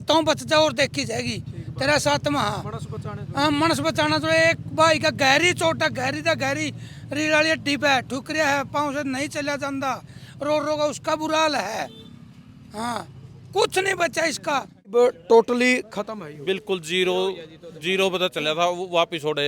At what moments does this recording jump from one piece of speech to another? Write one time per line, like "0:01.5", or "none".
0:14.9